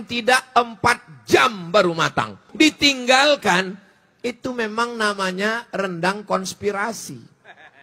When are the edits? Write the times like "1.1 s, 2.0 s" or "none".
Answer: 2.5 s